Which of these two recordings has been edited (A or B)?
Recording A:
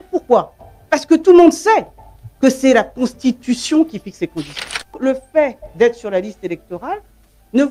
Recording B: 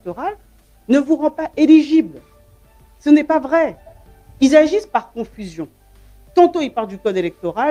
A